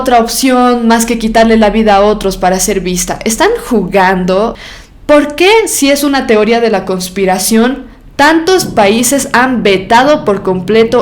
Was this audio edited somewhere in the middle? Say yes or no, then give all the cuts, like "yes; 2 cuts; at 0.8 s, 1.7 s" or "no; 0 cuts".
yes; 1 cut; at 4.7 s